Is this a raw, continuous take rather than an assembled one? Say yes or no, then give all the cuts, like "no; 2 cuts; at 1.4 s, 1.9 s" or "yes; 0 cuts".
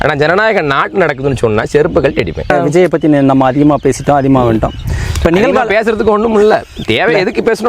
no; 1 cut; at 2.5 s